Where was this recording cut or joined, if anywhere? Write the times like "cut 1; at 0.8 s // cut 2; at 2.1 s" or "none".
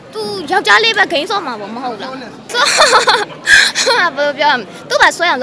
cut 1; at 2.4 s

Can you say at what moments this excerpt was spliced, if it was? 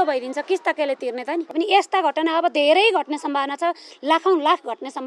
cut 1; at 1.5 s

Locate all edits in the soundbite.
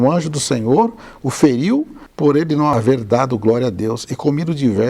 none

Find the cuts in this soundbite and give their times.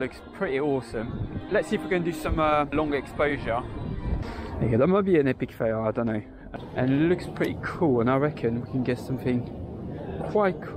cut 1; at 1.3 s // cut 2; at 2.7 s // cut 3; at 4.2 s // cut 4; at 6.4 s

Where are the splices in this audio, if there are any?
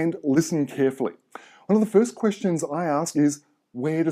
cut 1; at 1.6 s

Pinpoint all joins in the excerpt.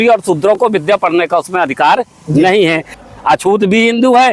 cut 1; at 2.9 s

